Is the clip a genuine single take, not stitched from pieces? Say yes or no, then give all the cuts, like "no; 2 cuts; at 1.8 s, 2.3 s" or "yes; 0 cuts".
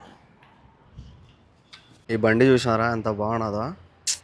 no; 1 cut; at 2.0 s